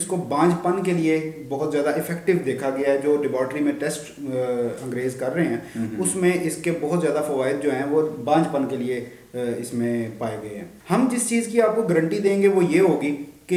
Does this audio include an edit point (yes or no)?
yes